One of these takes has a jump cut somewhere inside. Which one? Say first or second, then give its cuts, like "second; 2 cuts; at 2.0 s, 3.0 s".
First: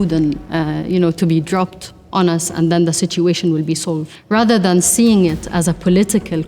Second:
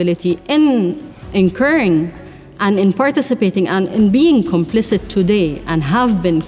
first; 1 cut; at 4.1 s